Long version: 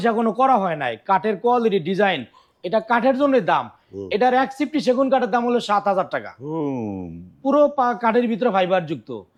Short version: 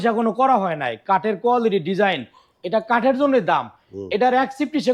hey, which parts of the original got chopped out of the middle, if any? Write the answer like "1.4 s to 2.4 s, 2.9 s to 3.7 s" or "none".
none